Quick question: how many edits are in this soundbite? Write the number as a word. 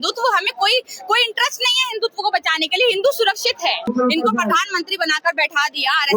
one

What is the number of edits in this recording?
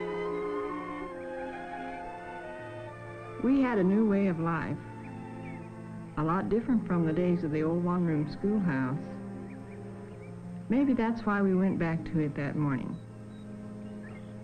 one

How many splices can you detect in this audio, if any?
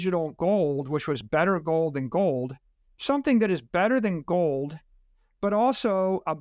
zero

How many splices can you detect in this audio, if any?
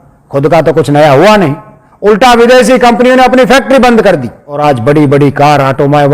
one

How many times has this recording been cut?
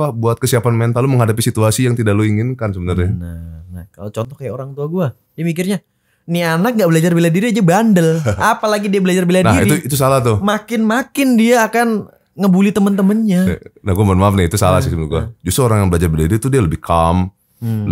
zero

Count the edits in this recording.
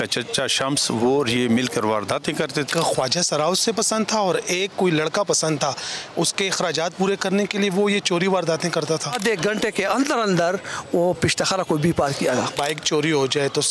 three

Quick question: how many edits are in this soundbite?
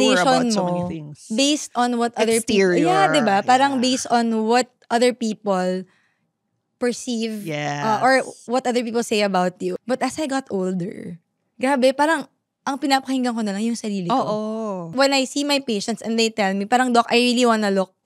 two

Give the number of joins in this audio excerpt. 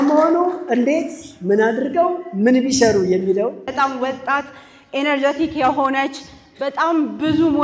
one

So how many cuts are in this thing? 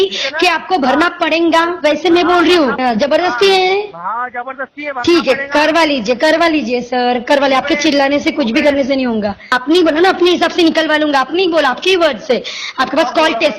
two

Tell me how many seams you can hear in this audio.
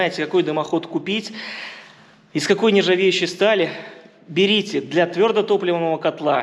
zero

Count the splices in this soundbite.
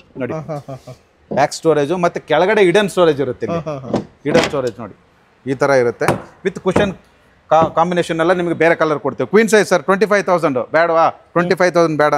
zero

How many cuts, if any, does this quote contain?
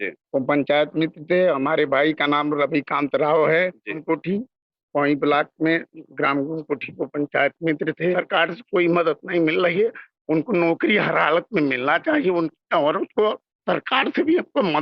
two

